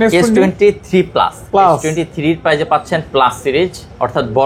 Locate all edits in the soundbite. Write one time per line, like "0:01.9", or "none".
none